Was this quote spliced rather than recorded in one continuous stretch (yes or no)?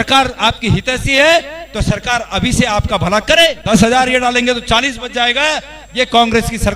yes